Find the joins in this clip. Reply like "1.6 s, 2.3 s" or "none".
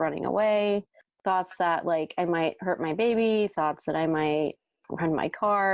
1.0 s